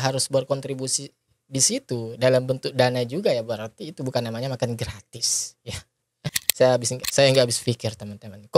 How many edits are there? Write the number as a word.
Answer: one